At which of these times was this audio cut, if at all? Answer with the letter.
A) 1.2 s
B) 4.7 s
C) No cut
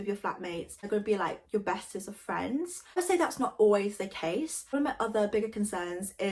B